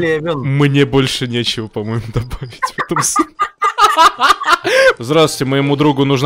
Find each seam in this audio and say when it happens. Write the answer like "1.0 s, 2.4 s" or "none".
5.0 s